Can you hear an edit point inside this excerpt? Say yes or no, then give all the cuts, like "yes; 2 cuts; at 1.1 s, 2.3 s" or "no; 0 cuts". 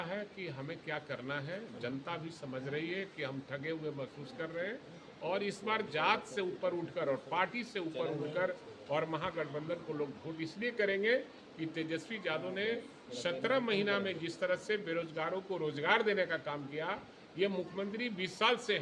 no; 0 cuts